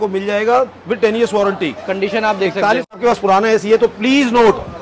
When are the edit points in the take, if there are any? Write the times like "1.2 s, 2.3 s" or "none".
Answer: 3.0 s